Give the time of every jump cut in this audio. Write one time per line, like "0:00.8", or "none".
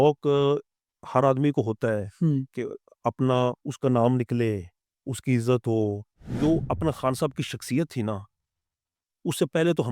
0:03.7
0:06.2